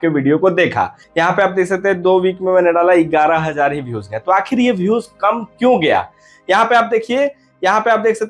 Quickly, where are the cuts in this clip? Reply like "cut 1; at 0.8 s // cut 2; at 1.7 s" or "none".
cut 1; at 1.0 s